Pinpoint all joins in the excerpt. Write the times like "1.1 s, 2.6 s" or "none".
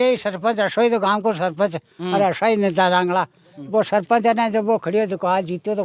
none